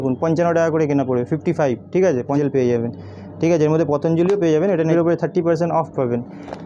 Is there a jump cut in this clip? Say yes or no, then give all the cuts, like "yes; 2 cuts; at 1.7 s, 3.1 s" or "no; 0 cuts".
yes; 2 cuts; at 2.4 s, 4.9 s